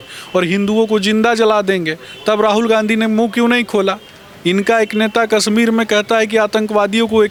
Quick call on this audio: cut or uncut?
uncut